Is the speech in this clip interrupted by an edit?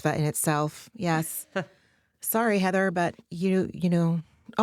no; 0 cuts

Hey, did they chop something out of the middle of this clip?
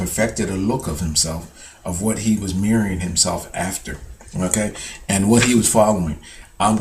yes; 1 cut; at 3.5 s

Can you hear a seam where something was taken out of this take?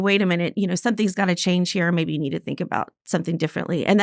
no; 0 cuts

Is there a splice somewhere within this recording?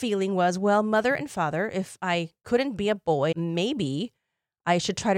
no; 0 cuts

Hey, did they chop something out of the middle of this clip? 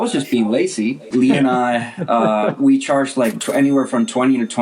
yes; 1 cut; at 1.1 s

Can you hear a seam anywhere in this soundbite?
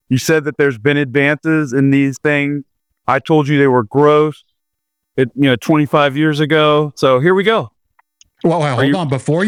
no; 0 cuts

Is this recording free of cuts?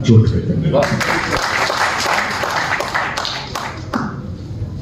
yes; 0 cuts

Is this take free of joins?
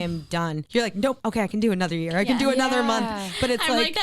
no; 1 cut; at 1.1 s

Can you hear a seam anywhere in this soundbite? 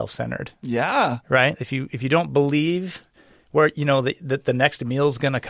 no; 0 cuts

